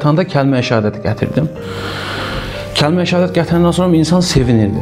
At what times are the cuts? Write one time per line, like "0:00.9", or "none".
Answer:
none